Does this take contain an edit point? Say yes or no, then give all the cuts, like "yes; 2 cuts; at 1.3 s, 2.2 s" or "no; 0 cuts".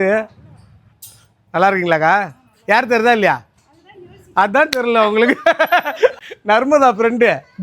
yes; 1 cut; at 6.2 s